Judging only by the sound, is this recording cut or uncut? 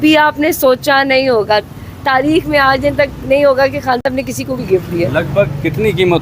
cut